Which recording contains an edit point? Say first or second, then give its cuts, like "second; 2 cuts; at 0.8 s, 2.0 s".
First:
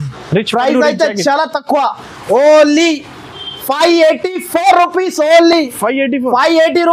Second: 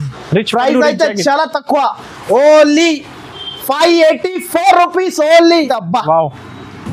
second; 1 cut; at 5.6 s